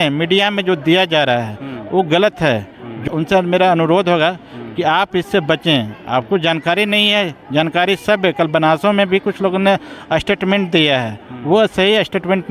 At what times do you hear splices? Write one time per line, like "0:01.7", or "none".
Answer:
0:03.0